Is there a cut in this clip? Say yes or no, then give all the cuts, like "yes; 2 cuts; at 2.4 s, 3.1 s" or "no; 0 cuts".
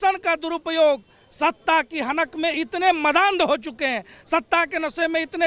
no; 0 cuts